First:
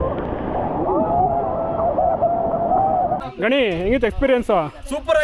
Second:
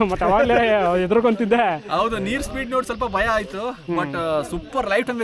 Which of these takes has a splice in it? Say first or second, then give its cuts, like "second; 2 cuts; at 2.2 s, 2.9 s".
first; 1 cut; at 3.2 s